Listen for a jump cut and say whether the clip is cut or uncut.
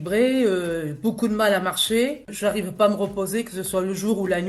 cut